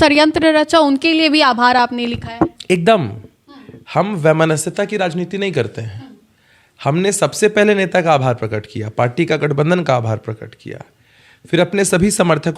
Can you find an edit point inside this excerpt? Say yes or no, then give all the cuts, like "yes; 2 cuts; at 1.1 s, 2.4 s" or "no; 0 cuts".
no; 0 cuts